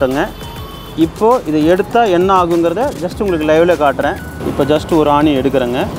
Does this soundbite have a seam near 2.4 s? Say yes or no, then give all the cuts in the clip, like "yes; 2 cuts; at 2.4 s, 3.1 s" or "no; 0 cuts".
no; 1 cut; at 4.3 s